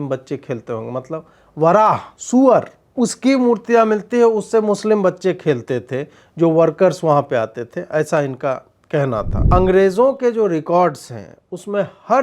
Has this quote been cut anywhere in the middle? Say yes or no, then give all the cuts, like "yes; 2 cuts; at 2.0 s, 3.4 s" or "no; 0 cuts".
yes; 3 cuts; at 2.1 s, 2.8 s, 9.4 s